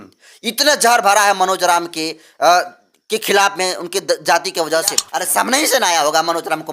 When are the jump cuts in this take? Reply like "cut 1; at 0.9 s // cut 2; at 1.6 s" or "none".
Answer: cut 1; at 5.1 s